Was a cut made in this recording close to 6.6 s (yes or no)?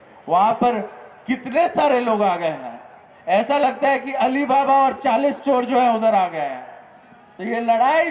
no